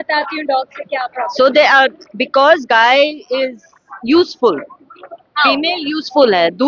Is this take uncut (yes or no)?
yes